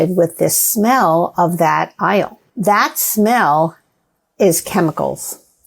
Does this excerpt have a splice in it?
yes; 1 cut; at 2.4 s

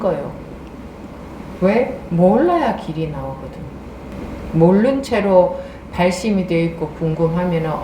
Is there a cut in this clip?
yes; 1 cut; at 4.1 s

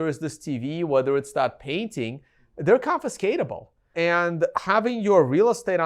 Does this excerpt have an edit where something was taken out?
yes; 1 cut; at 3.9 s

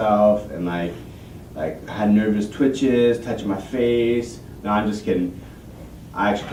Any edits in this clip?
no; 0 cuts

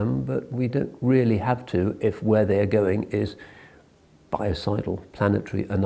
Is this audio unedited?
yes; 0 cuts

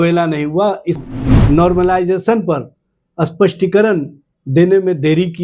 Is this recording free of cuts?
no; 1 cut; at 1.0 s

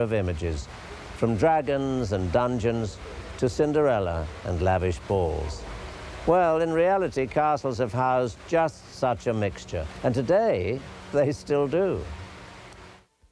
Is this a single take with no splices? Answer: yes; 0 cuts

